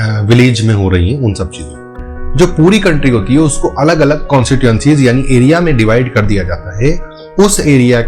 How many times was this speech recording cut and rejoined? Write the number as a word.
one